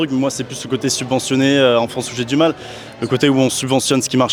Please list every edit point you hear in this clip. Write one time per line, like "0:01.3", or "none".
none